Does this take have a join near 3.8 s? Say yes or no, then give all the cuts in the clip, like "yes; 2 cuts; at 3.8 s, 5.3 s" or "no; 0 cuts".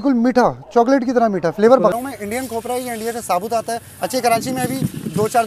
no; 1 cut; at 1.9 s